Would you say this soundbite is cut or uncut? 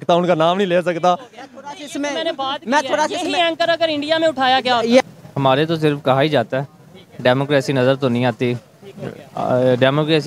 cut